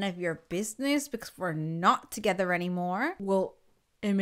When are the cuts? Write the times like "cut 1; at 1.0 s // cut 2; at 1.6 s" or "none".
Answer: cut 1; at 3.2 s